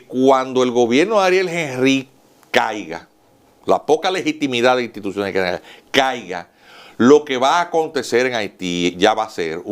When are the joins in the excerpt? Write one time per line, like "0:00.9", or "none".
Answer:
none